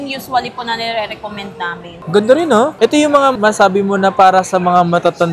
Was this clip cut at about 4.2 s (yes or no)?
no